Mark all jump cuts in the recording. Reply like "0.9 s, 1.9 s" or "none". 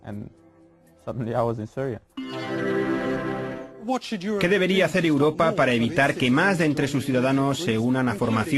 none

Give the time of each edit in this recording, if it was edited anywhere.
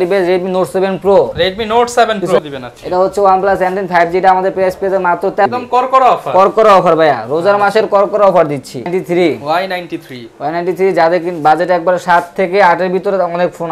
2.4 s, 5.5 s, 8.9 s

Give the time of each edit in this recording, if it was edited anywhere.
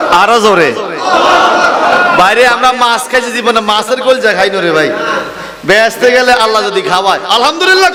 none

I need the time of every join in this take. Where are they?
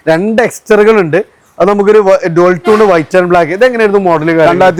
none

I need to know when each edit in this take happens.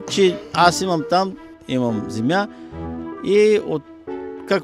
1.6 s

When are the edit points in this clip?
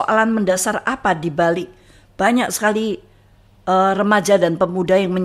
none

